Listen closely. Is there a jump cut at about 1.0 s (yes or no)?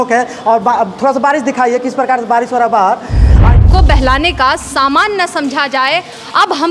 no